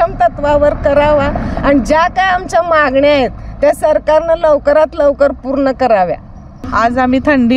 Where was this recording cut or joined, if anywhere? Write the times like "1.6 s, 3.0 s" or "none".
6.6 s